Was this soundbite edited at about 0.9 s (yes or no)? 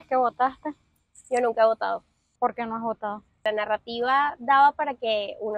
no